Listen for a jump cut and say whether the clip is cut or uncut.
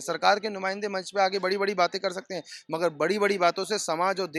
uncut